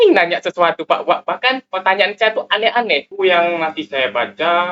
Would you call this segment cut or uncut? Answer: cut